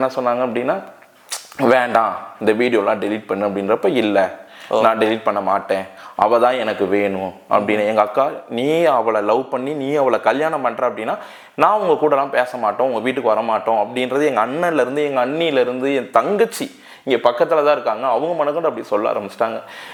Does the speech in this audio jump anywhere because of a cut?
no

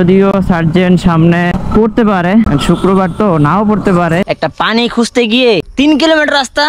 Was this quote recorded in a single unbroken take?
no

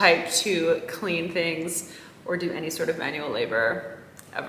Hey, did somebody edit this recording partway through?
no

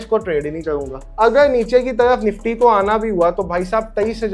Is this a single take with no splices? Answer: no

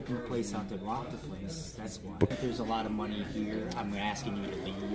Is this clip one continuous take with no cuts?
no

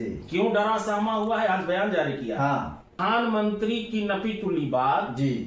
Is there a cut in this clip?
yes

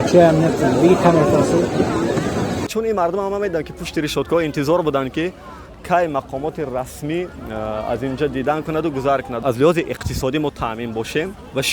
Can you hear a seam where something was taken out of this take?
yes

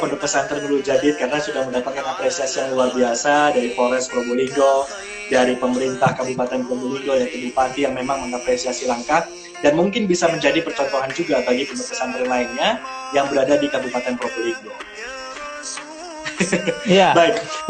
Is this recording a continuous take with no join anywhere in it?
yes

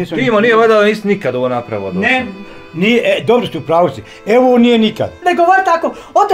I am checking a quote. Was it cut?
yes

